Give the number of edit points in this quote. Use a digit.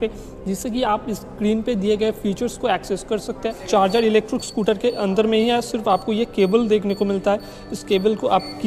1